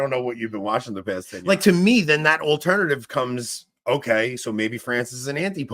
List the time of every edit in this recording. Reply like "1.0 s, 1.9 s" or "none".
1.3 s